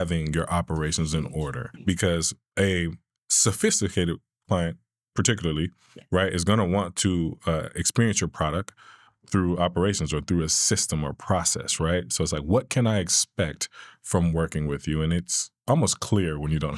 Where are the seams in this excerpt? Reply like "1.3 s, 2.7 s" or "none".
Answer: 1.7 s